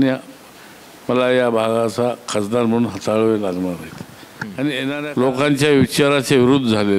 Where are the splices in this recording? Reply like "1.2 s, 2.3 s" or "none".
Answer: 5.0 s

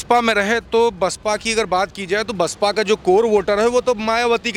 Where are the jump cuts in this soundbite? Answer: none

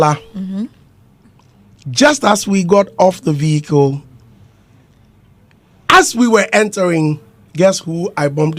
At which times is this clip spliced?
none

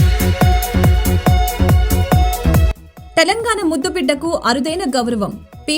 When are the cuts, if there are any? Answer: 2.6 s

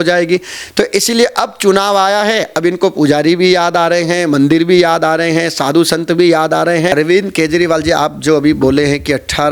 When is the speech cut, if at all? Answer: 6.9 s

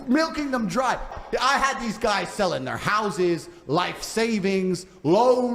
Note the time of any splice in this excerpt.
1.2 s

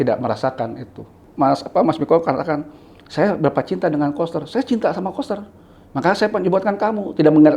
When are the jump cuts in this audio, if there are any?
1.2 s

